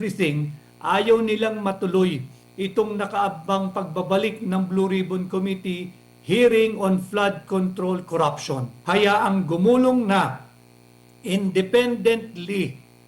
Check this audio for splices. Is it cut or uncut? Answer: cut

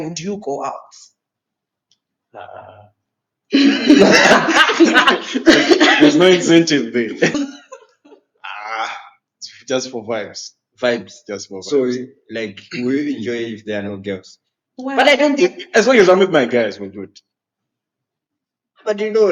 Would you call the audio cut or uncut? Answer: cut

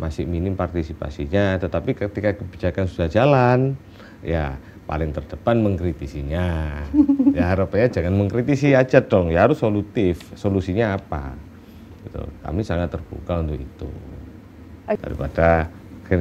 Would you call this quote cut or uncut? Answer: cut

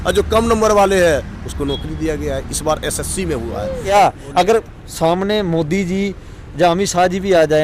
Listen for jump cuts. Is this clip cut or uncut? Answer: cut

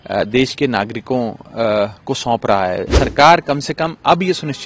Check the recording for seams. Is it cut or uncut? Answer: cut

